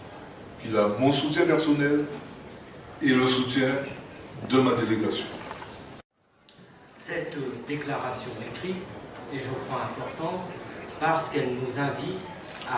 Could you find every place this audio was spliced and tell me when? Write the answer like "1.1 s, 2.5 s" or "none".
6.0 s